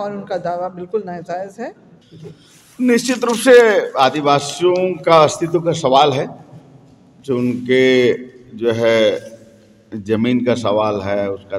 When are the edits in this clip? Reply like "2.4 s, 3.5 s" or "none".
1.9 s